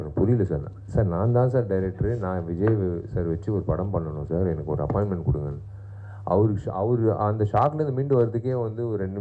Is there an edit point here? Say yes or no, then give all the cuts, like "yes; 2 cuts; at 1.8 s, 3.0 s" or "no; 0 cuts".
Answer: no; 0 cuts